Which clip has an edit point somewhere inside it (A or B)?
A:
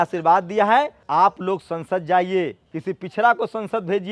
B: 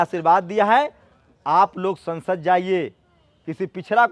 A